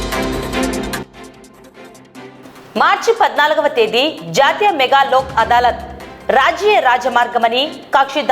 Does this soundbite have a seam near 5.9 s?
no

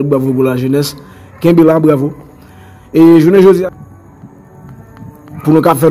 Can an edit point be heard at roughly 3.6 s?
yes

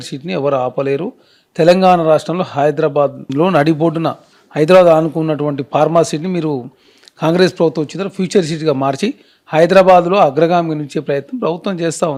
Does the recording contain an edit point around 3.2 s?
no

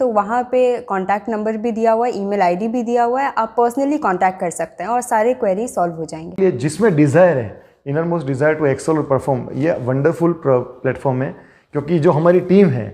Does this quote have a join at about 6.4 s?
yes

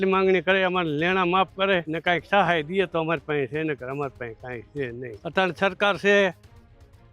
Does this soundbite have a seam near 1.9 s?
yes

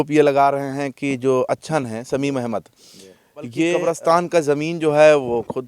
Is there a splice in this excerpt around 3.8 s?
yes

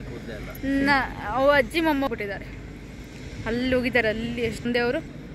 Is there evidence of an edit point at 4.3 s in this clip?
no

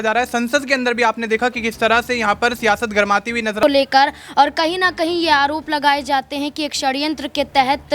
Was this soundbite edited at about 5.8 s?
no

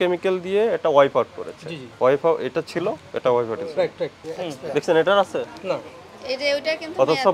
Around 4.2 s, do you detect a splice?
yes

